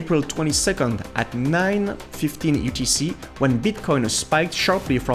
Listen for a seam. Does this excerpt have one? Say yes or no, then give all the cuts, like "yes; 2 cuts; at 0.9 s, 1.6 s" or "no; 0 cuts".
no; 0 cuts